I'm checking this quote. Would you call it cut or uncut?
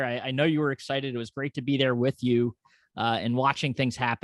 uncut